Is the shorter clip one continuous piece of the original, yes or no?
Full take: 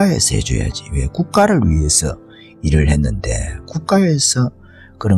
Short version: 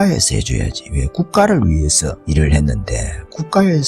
no